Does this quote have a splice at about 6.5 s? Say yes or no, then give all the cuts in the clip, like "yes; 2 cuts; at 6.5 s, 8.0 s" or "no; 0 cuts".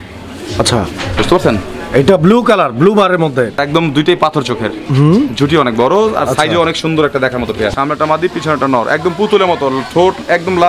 no; 2 cuts; at 3.6 s, 7.7 s